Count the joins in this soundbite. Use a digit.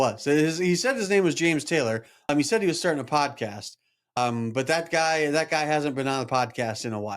2